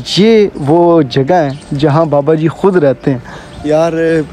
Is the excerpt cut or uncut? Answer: uncut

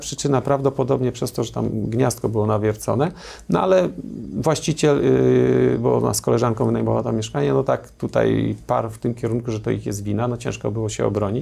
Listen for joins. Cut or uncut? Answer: uncut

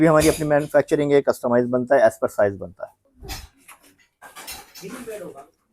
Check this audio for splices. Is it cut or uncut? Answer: cut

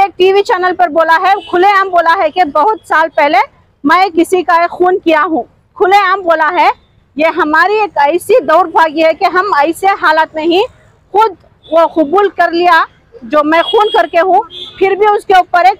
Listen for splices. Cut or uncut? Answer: uncut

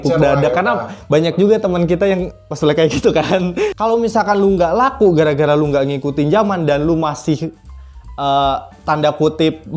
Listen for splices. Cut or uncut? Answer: cut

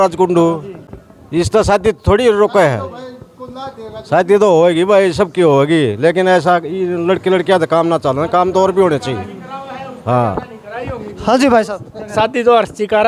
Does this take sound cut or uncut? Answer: uncut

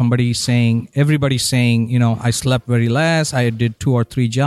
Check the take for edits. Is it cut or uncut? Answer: uncut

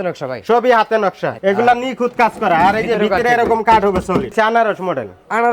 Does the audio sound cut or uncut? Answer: cut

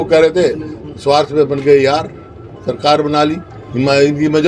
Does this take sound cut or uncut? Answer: uncut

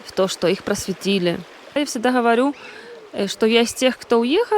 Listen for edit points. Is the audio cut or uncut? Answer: cut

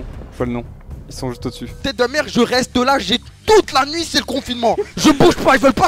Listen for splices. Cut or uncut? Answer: cut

